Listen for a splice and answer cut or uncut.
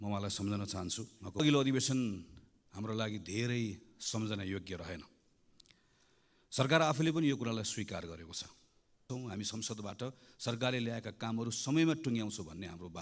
cut